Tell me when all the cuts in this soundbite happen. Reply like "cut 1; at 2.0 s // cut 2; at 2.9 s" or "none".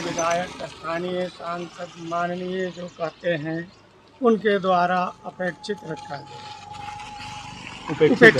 none